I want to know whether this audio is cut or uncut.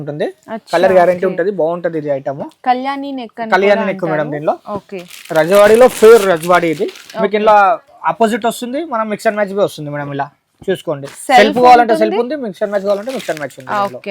uncut